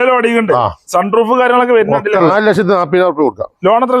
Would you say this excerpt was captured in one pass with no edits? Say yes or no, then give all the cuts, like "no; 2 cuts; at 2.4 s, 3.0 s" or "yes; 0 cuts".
no; 1 cut; at 2.3 s